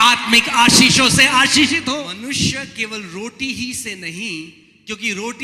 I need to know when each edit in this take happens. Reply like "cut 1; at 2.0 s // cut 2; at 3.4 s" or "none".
cut 1; at 2.1 s